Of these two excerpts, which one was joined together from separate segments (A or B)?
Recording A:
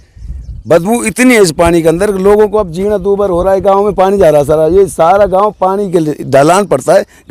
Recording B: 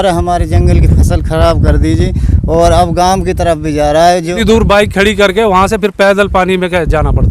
B